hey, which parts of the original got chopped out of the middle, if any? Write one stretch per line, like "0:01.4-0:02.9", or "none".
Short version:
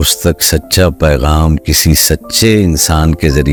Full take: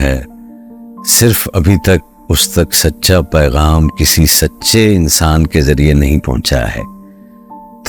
none